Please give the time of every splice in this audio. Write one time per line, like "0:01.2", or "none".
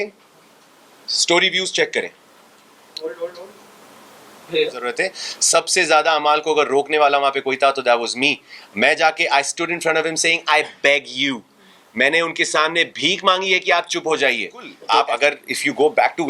0:04.8
0:14.7